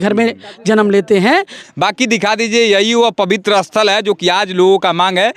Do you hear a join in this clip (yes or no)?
yes